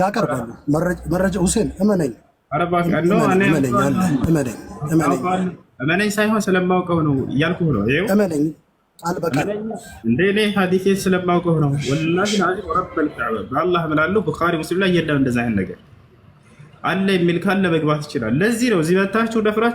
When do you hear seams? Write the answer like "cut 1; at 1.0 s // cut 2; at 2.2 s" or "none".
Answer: none